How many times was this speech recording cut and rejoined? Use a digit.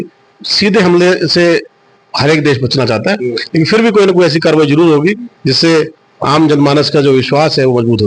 0